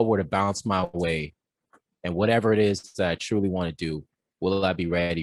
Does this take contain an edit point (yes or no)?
no